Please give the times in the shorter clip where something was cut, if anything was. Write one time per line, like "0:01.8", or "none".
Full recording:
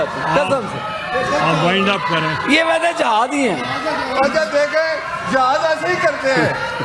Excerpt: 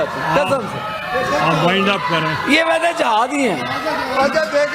none